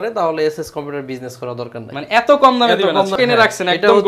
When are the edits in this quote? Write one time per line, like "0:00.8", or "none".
0:03.1